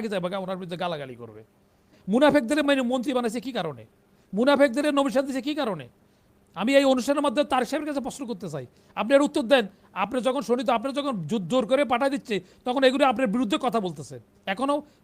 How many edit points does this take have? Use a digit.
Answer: 1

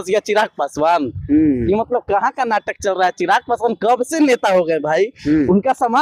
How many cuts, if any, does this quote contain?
0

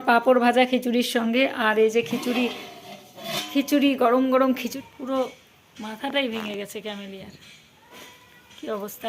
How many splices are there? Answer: 1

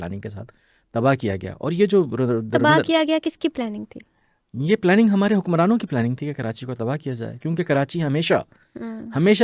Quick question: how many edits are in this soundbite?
0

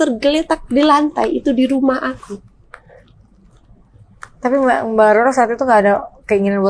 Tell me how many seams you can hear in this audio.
0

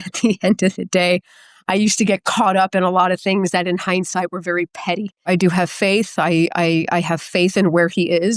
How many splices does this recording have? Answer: 1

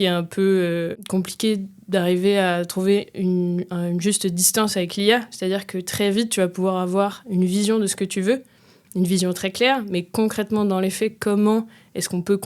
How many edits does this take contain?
1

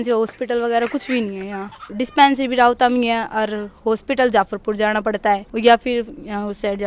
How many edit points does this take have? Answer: 0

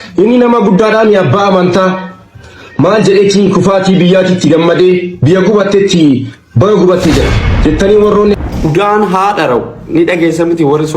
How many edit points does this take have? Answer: 1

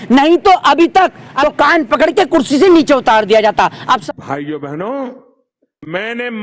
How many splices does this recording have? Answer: 2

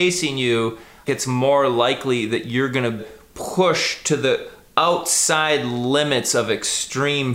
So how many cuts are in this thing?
2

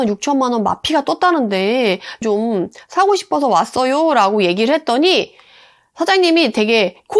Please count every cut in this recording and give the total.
1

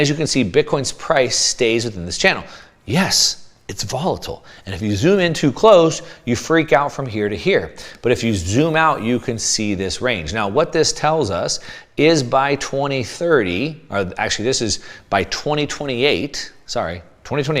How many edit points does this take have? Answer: 0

